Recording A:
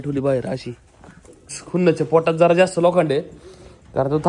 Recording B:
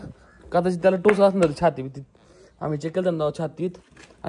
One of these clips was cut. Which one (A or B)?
A